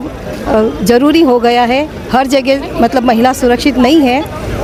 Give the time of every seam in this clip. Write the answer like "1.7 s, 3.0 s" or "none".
none